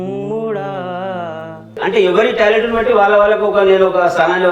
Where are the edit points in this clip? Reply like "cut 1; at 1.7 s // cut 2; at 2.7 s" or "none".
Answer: cut 1; at 1.8 s